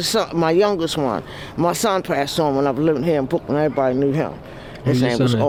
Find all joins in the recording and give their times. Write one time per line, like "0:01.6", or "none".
none